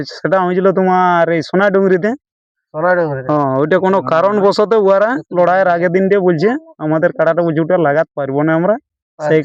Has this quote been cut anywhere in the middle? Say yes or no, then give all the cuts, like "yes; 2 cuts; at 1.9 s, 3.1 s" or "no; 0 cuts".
no; 0 cuts